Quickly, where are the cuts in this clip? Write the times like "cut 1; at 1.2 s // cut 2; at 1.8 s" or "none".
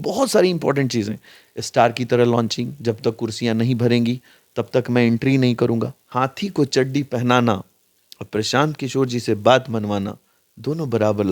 cut 1; at 6.0 s